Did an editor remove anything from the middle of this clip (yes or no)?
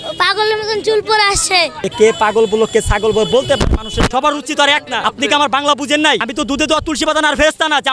yes